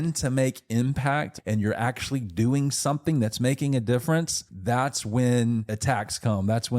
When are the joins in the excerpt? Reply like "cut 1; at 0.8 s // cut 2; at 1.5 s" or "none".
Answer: cut 1; at 1.3 s // cut 2; at 4.4 s // cut 3; at 5.7 s